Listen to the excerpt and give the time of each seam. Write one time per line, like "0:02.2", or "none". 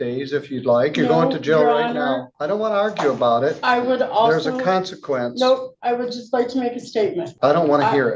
0:02.7
0:07.3